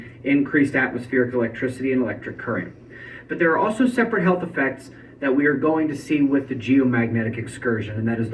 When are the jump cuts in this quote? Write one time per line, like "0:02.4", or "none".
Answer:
0:04.8